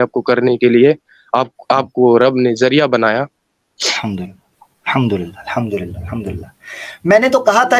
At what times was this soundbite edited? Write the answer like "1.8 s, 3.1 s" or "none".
none